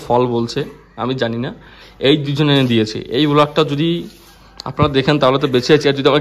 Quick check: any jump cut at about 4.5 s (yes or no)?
no